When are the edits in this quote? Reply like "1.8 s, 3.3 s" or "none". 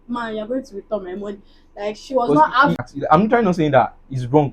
2.8 s